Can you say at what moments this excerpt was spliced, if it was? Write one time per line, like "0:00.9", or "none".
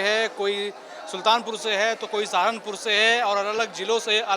none